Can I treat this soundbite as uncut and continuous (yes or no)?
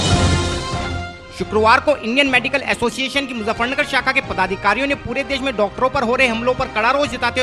yes